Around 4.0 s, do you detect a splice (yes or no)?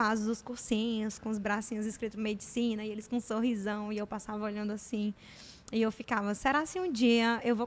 no